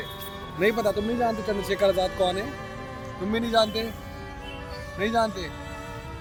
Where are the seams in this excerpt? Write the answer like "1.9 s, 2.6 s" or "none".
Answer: none